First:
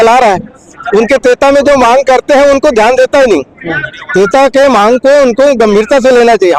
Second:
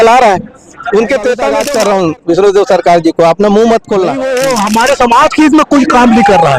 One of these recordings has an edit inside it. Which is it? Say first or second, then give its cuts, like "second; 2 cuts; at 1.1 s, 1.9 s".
second; 2 cuts; at 1.6 s, 4.2 s